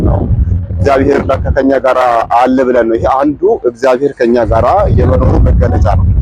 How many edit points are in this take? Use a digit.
0